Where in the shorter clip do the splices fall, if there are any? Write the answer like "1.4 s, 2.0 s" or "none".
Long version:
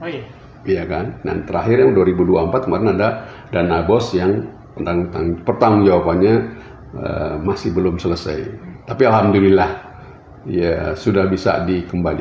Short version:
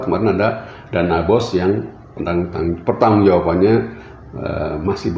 none